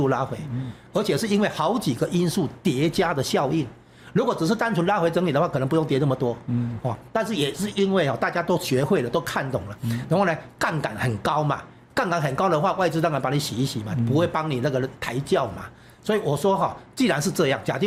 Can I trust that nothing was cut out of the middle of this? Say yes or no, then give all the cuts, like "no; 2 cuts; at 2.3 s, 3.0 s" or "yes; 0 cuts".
yes; 0 cuts